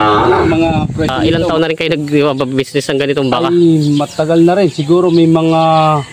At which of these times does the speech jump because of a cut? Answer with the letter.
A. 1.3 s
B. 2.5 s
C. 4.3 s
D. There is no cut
A